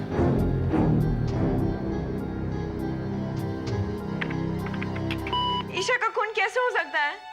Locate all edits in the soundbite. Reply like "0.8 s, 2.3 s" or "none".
5.7 s